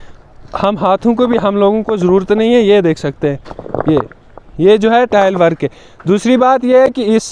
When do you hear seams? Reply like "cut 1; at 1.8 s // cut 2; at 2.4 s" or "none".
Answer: none